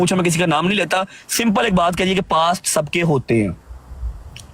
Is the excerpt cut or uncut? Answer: uncut